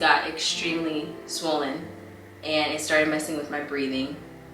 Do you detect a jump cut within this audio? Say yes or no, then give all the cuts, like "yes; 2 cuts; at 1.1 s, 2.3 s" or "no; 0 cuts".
no; 0 cuts